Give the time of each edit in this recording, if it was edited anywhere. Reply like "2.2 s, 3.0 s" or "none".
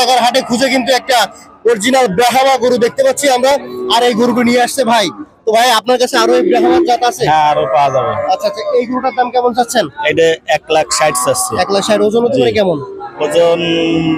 none

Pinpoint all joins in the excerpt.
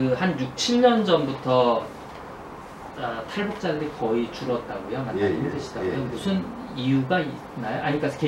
none

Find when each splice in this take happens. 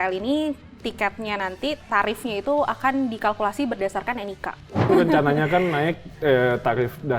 4.9 s

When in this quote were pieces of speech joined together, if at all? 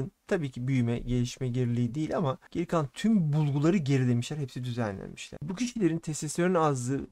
5.3 s

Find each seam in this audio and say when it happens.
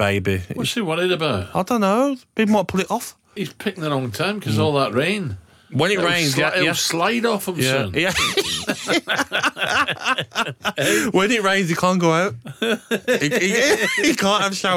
3.3 s

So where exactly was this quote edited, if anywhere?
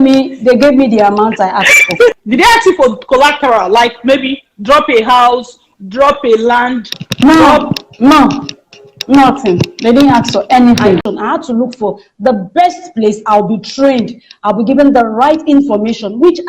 2.2 s, 11.1 s

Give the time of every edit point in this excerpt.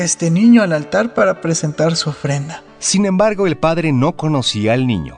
none

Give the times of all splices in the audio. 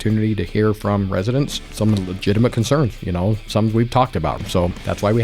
1.6 s, 4.4 s

